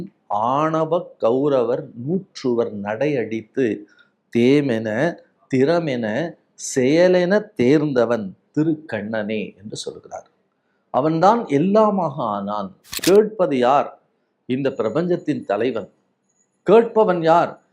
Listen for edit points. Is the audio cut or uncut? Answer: cut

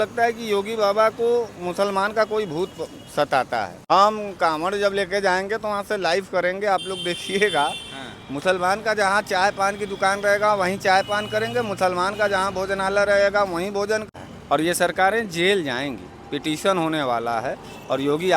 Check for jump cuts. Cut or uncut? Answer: cut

